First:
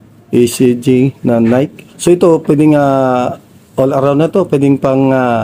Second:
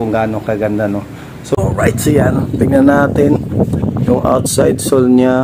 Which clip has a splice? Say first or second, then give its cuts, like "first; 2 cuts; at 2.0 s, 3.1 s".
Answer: second; 1 cut; at 1.4 s